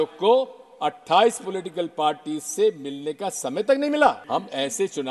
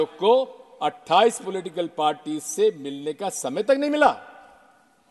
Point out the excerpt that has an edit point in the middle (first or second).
first